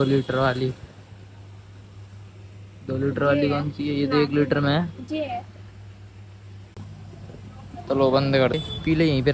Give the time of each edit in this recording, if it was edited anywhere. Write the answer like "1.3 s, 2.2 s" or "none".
6.8 s, 8.5 s